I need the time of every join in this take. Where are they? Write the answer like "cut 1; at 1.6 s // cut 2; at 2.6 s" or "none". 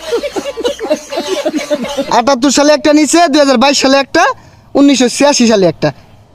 cut 1; at 1.6 s